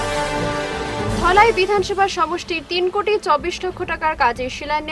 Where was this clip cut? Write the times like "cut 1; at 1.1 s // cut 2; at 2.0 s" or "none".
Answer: cut 1; at 1.0 s